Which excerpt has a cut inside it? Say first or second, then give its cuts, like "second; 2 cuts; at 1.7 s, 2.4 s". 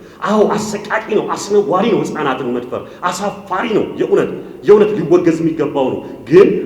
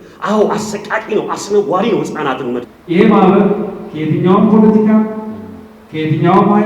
second; 1 cut; at 2.8 s